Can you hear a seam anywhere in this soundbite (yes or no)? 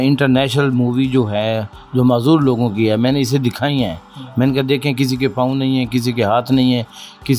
no